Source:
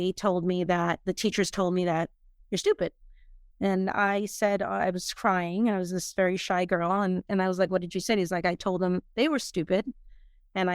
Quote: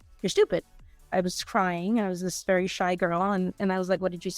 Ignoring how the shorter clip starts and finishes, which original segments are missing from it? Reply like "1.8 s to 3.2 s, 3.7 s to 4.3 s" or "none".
3.4 s to 4.8 s